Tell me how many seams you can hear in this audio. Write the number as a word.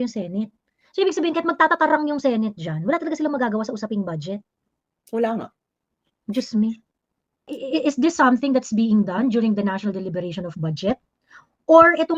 one